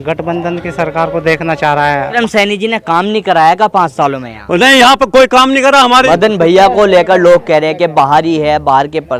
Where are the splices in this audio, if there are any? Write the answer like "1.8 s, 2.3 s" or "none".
2.1 s, 6.0 s

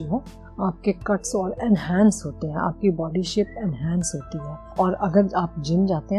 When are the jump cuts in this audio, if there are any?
4.7 s

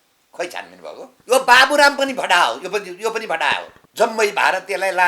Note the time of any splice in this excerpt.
1.1 s, 3.8 s

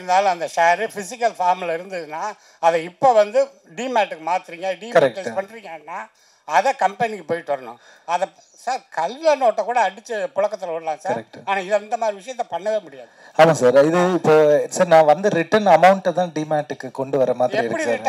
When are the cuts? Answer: none

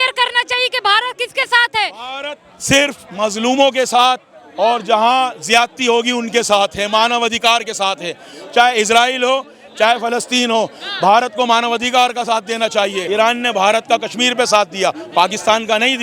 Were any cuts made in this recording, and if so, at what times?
13.0 s

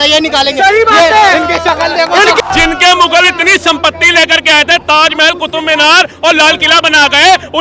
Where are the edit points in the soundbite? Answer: 2.4 s

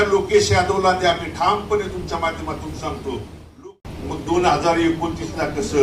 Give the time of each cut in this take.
3.6 s

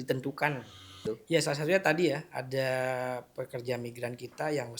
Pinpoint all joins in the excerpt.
1.0 s

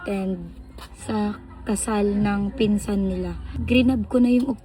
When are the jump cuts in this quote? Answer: 3.5 s

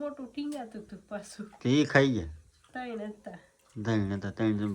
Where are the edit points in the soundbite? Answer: none

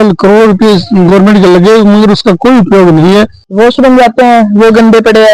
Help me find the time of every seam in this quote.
3.4 s

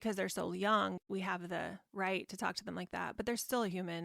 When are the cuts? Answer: 1.0 s

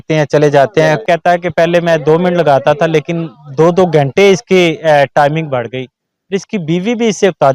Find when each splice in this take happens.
1.0 s

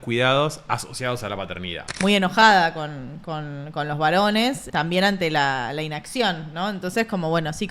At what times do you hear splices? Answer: 1.9 s, 4.6 s

